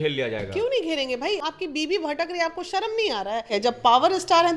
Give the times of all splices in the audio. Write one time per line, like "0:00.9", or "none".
0:01.4
0:03.6